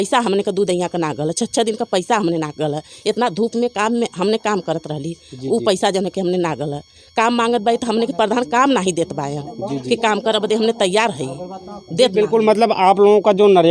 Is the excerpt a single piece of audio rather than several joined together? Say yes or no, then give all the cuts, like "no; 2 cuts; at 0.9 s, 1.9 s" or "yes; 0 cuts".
yes; 0 cuts